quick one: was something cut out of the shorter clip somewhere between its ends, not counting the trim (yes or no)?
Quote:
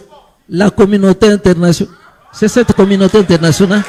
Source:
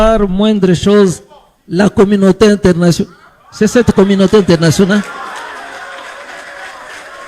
no